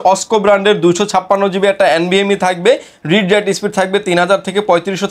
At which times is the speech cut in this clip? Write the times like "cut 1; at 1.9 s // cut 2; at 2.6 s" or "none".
none